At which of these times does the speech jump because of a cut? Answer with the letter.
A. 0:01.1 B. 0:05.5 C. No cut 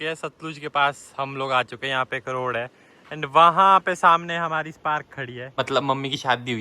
B